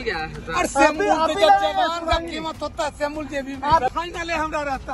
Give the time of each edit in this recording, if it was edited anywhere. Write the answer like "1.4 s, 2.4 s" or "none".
3.9 s